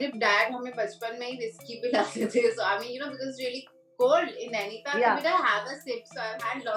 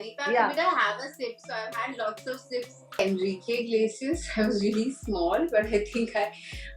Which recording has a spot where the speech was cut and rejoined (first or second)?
second